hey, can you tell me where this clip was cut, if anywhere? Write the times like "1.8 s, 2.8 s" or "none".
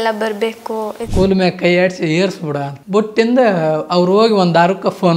1.0 s, 2.7 s